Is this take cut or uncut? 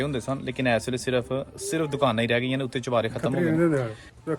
cut